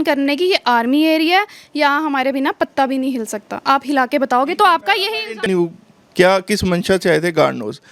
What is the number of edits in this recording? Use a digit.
1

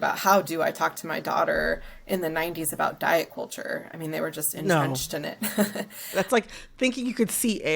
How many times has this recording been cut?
1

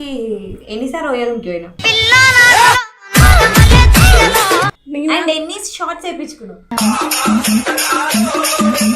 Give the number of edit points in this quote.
1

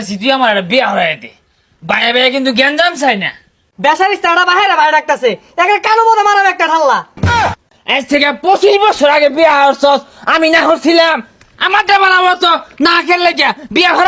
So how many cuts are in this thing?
2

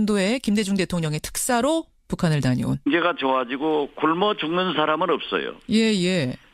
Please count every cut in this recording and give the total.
0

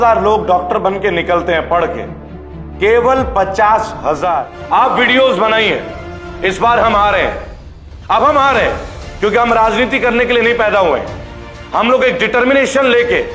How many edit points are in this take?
1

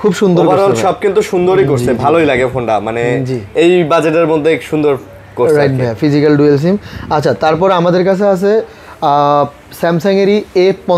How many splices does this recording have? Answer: 0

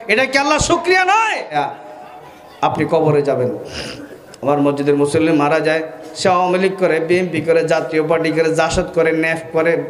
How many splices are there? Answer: 1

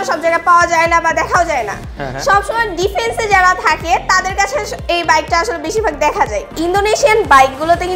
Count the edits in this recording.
1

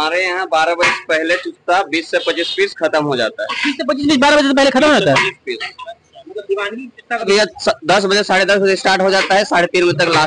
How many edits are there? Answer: 1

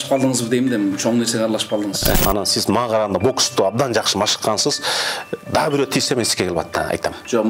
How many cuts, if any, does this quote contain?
1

